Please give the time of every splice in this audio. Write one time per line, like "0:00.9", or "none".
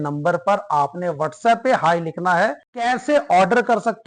0:02.7